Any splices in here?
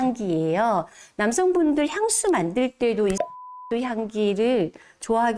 no; 0 cuts

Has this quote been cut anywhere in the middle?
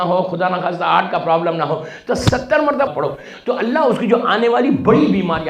yes; 1 cut; at 2.9 s

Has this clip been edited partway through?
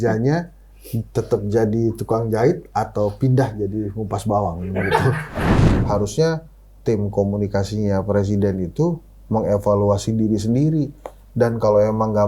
yes; 1 cut; at 5.7 s

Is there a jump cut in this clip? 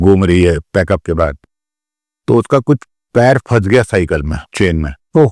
no; 0 cuts

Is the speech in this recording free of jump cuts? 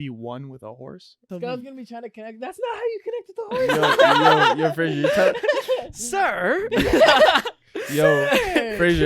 no; 1 cut; at 1.3 s

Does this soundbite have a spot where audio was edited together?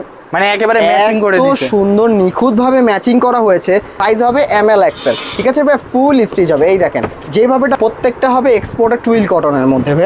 yes; 2 cuts; at 3.9 s, 7.8 s

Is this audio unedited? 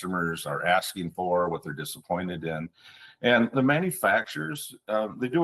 yes; 0 cuts

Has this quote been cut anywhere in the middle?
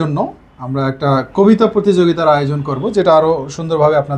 no; 0 cuts

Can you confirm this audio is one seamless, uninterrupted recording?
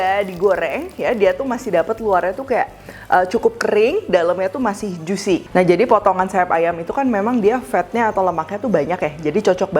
yes; 0 cuts

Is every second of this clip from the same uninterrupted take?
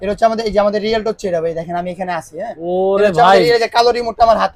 yes; 0 cuts

